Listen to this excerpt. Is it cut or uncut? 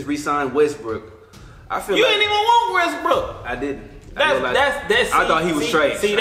uncut